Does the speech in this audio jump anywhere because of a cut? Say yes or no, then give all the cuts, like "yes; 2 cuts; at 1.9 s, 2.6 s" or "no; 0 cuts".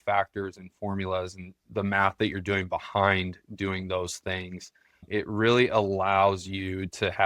yes; 1 cut; at 5.0 s